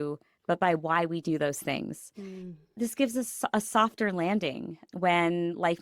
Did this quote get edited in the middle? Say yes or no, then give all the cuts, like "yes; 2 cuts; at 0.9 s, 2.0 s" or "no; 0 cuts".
yes; 1 cut; at 2.7 s